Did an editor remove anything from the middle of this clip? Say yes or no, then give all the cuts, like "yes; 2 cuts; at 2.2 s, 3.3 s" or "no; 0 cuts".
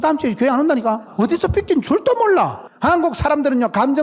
yes; 2 cuts; at 1.1 s, 2.7 s